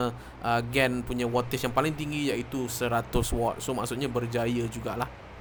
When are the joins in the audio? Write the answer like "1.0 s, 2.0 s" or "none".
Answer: none